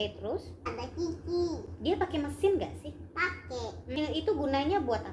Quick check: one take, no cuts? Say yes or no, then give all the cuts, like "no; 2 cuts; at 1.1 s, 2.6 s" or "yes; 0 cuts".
no; 2 cuts; at 0.9 s, 4.0 s